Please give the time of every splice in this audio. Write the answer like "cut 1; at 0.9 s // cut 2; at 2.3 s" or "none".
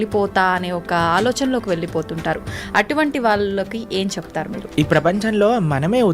cut 1; at 4.6 s